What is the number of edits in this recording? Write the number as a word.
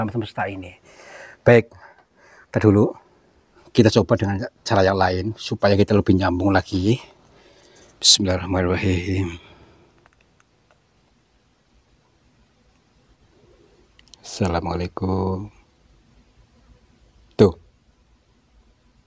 two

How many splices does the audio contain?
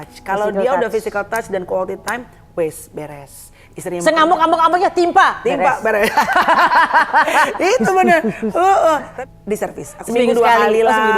one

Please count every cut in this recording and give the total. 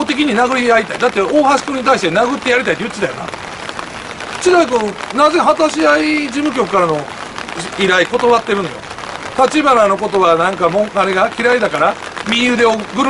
zero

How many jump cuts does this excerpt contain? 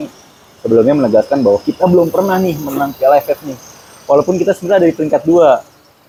zero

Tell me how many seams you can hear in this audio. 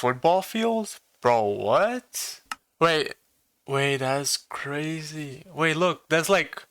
one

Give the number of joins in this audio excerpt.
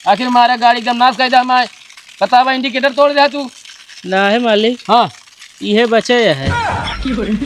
one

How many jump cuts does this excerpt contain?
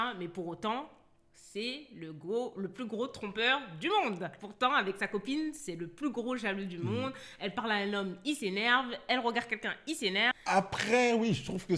one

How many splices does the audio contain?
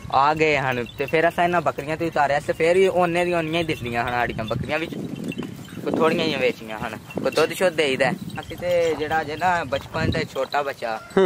one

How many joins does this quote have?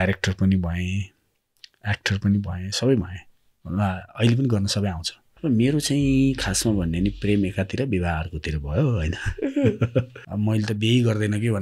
two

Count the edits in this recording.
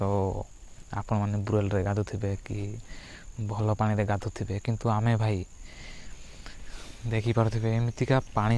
zero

